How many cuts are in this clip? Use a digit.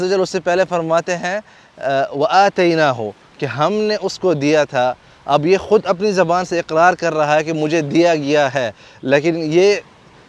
0